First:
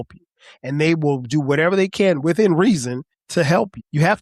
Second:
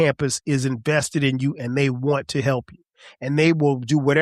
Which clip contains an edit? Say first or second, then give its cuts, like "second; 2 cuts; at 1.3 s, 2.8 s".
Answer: first; 1 cut; at 3.3 s